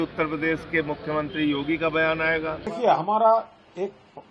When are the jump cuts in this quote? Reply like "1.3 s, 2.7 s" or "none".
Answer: 2.6 s